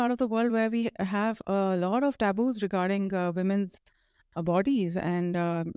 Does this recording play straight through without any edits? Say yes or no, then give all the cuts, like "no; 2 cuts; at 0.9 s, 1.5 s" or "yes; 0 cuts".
yes; 0 cuts